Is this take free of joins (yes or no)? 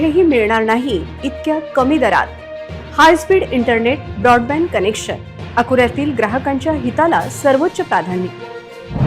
yes